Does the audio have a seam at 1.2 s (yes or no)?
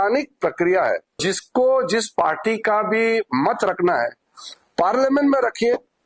yes